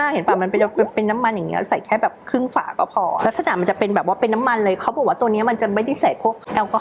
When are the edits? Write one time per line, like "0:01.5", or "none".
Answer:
0:03.2